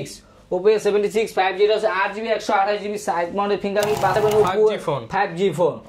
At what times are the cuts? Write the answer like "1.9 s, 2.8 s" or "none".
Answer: 4.2 s